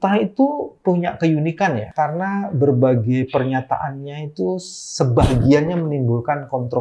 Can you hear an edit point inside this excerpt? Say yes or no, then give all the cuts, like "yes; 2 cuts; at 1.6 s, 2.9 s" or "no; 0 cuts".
yes; 1 cut; at 1.9 s